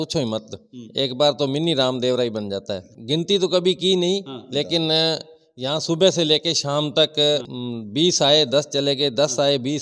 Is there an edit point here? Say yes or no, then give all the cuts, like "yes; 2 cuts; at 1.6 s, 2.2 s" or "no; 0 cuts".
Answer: no; 0 cuts